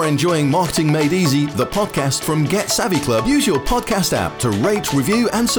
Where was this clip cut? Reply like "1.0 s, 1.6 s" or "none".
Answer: none

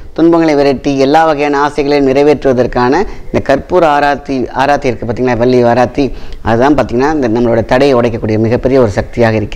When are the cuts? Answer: none

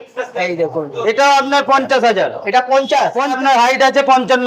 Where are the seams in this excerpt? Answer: 3.4 s

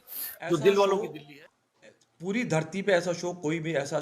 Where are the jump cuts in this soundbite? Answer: 1.1 s

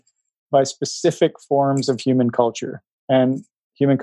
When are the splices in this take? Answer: none

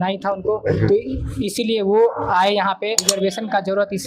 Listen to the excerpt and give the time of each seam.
3.1 s

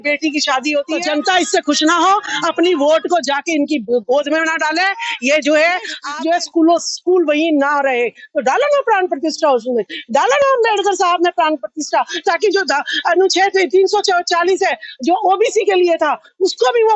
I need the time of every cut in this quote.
1.0 s, 6.0 s

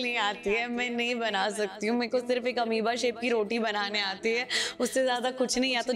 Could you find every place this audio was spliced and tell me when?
none

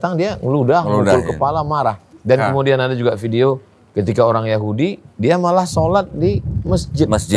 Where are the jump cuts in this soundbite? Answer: 2.1 s

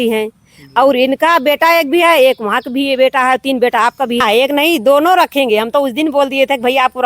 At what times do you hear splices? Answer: 4.2 s

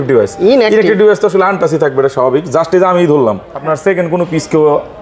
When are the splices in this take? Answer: 3.5 s

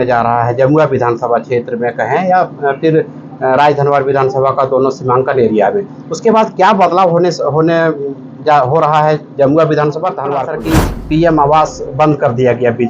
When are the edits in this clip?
10.5 s

